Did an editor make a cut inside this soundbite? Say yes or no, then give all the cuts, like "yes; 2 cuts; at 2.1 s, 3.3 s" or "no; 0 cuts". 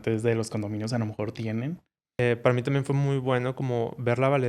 yes; 1 cut; at 2.2 s